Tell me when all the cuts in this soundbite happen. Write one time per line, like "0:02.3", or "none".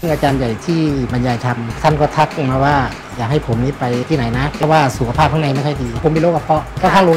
0:01.3
0:04.6
0:06.0